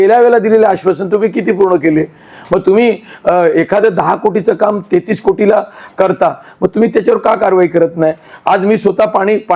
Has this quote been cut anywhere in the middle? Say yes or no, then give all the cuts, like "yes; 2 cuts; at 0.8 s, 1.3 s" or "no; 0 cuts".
no; 0 cuts